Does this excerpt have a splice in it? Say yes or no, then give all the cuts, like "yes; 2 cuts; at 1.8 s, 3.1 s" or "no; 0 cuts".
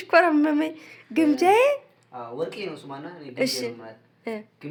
no; 0 cuts